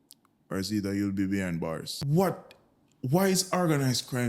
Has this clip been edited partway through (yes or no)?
yes